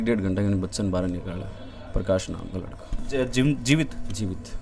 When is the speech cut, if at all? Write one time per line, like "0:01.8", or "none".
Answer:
none